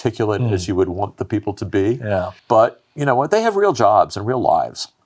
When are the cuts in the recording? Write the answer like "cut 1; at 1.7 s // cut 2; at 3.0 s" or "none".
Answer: cut 1; at 2.4 s

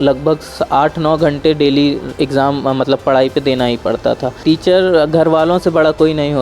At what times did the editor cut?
cut 1; at 4.4 s

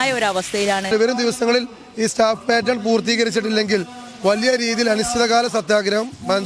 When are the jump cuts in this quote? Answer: cut 1; at 0.9 s

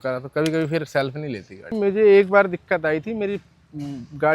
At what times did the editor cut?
cut 1; at 1.8 s

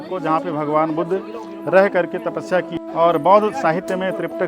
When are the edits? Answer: cut 1; at 2.7 s

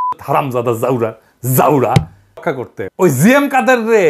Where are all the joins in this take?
cut 1; at 2.5 s

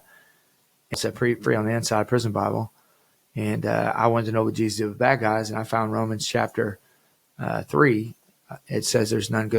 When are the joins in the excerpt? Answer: cut 1; at 1.0 s

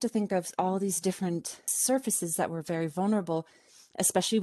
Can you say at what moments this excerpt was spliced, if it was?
cut 1; at 1.7 s

